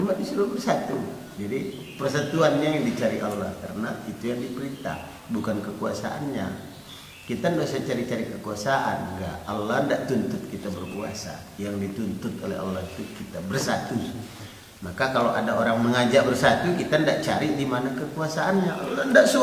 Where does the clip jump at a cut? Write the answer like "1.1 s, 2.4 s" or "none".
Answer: none